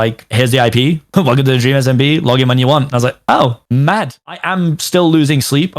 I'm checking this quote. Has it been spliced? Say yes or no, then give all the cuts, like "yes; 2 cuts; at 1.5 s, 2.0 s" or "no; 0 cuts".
yes; 1 cut; at 4.2 s